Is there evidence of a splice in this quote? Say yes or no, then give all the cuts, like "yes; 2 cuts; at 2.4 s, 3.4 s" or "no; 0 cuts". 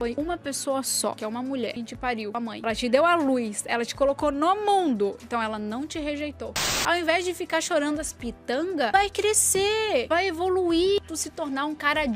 yes; 3 cuts; at 2.6 s, 6.8 s, 11.0 s